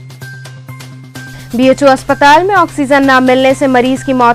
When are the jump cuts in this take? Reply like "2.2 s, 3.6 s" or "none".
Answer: none